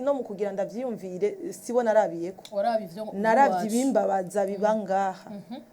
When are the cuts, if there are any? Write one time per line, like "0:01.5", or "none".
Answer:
none